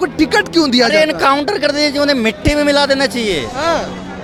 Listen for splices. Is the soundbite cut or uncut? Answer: uncut